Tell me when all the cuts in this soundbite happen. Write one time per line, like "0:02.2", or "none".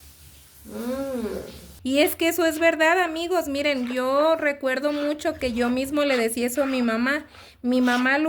0:01.7